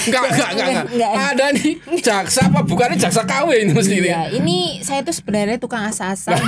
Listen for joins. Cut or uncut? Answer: uncut